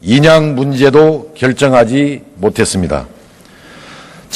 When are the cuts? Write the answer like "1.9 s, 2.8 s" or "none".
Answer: 2.4 s